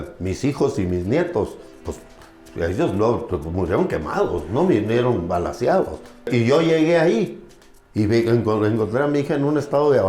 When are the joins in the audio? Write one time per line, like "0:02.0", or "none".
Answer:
0:06.3

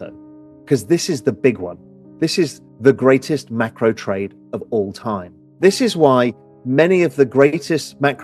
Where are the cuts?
0:02.6
0:05.4

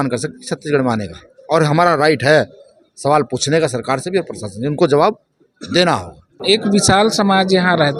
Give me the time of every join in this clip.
0:06.4

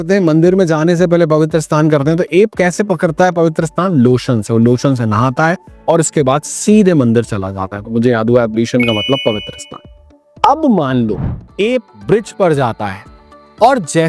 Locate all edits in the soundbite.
0:11.3

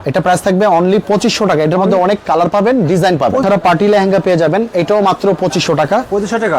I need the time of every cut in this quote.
0:03.4

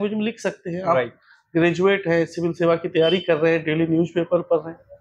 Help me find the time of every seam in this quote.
none

